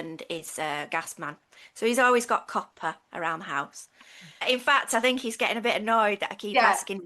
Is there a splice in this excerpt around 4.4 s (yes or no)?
yes